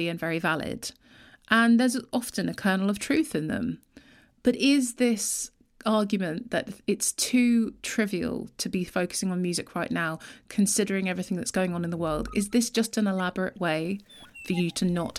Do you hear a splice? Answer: no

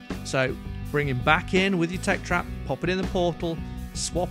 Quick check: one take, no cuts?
yes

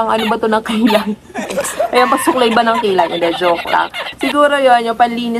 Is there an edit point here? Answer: no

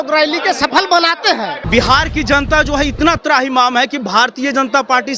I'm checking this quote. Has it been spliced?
yes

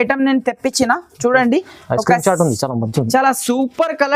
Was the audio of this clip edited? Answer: no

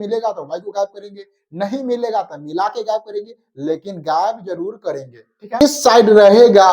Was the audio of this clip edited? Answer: yes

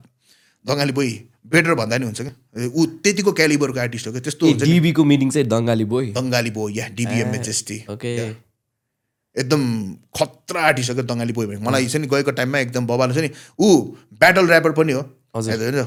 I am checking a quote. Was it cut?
no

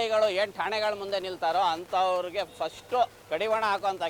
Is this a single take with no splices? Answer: no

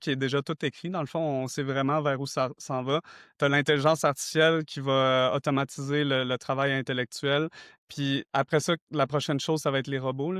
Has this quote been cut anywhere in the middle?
no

